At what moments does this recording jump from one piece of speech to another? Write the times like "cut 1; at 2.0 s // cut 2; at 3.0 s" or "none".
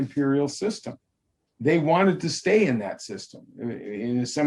none